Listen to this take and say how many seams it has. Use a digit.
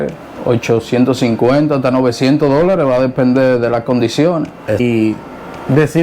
1